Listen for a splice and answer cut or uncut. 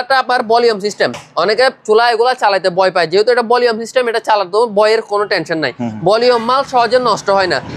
uncut